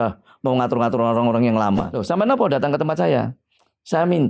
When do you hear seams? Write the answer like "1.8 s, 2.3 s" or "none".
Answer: 1.9 s